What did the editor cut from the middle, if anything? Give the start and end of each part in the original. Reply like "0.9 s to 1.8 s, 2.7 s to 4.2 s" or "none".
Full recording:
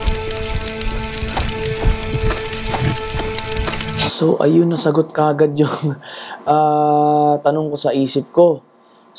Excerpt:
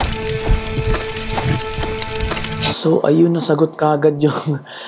none